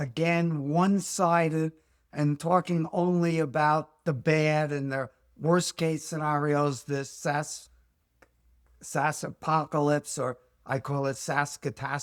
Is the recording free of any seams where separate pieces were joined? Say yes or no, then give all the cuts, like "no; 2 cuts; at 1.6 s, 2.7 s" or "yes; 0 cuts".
yes; 0 cuts